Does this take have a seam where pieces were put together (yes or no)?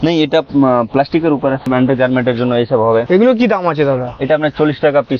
yes